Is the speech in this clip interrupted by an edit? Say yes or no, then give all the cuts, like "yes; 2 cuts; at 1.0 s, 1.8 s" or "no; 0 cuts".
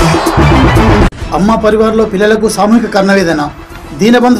no; 0 cuts